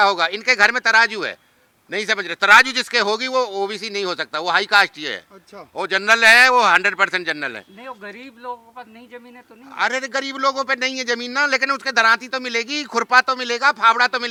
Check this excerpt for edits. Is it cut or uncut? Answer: uncut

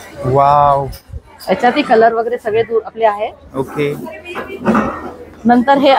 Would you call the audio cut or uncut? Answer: uncut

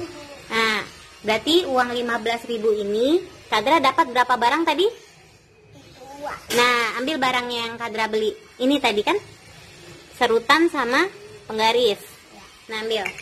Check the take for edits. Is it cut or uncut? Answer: uncut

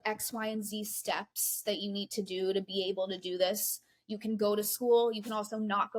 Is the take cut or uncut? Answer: uncut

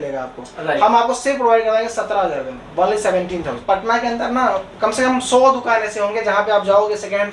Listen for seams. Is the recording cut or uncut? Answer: cut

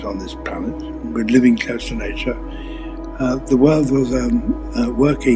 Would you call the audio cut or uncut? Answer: uncut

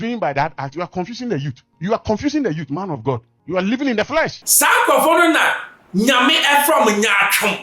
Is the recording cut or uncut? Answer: cut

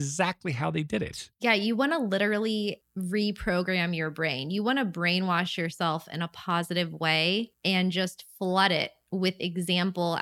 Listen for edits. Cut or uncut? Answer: cut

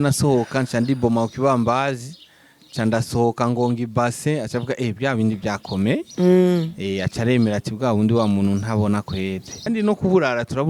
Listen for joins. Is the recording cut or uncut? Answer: cut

